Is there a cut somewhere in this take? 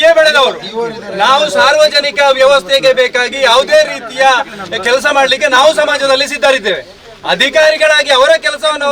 no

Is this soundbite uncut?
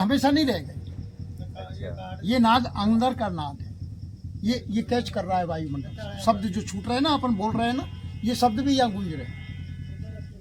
yes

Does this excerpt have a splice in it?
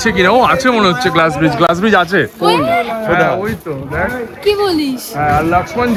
no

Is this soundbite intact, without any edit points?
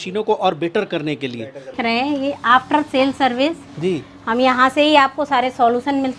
no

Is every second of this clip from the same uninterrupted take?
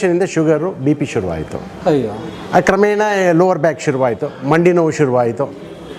yes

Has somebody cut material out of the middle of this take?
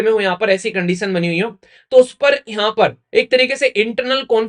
no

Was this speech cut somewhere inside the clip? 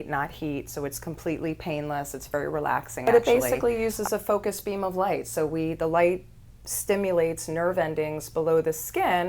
yes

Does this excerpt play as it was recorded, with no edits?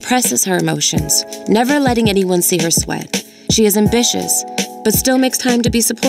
yes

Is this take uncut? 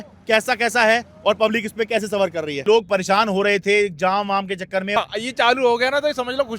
no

